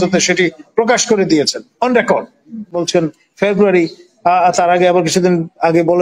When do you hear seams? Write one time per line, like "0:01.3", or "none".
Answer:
0:02.8